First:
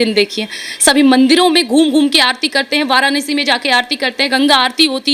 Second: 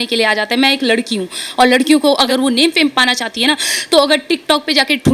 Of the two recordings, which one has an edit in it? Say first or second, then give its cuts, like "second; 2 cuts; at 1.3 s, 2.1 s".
second; 1 cut; at 2.3 s